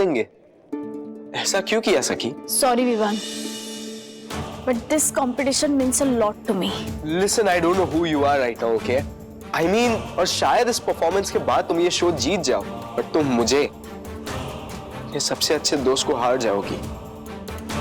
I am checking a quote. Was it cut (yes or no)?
yes